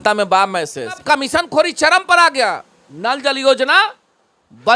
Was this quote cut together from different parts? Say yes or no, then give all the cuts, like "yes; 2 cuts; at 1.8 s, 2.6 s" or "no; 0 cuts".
yes; 1 cut; at 1.0 s